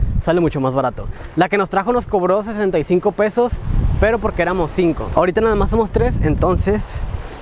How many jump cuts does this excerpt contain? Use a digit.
0